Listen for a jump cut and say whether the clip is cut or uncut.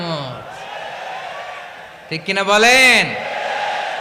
uncut